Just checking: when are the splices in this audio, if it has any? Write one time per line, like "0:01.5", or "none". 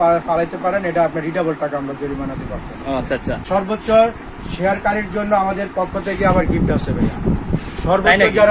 0:03.4